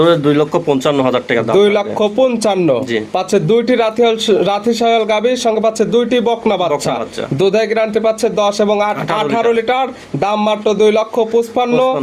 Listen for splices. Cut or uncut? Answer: uncut